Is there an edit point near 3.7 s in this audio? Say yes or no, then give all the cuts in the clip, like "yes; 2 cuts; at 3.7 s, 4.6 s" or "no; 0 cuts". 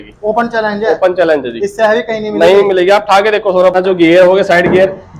yes; 1 cut; at 3.7 s